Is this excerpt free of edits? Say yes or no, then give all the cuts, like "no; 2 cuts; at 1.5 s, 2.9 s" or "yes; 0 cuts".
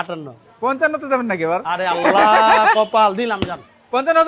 no; 1 cut; at 1.6 s